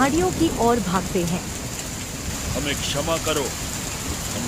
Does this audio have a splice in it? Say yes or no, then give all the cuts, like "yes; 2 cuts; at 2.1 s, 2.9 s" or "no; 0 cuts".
yes; 1 cut; at 2.3 s